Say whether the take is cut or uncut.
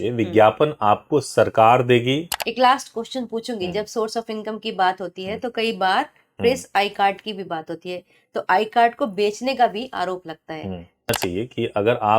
cut